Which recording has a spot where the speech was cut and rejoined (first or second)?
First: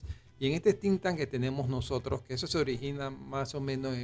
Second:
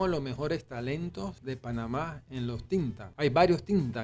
second